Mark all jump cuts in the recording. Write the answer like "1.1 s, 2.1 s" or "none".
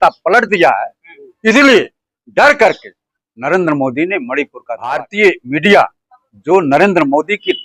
5.0 s